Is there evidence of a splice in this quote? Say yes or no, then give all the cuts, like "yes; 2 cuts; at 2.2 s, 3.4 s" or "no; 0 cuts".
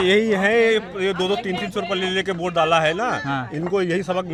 no; 0 cuts